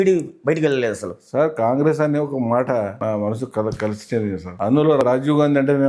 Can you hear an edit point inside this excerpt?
yes; 2 cuts; at 3.0 s, 5.0 s

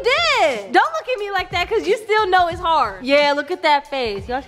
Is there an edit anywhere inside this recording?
no; 0 cuts

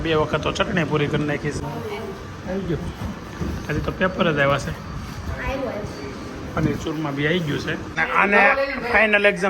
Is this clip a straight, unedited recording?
no; 2 cuts; at 1.6 s, 7.9 s

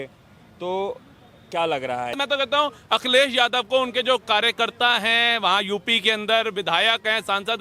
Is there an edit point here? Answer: yes; 1 cut; at 2.2 s

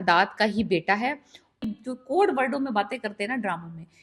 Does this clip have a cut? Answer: yes; 1 cut; at 1.6 s

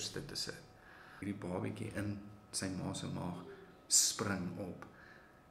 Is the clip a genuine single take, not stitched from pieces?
no; 1 cut; at 1.2 s

